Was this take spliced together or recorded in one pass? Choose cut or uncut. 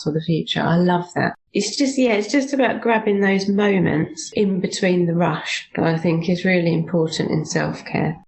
cut